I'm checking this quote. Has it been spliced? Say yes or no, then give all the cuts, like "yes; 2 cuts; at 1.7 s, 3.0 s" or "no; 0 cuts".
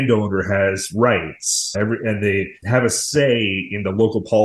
yes; 2 cuts; at 1.7 s, 2.6 s